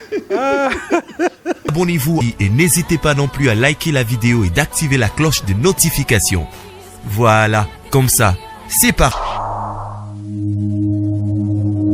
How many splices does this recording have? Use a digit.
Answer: 1